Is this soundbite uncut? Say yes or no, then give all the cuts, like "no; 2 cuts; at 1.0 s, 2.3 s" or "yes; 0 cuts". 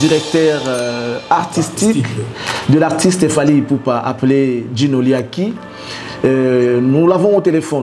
yes; 0 cuts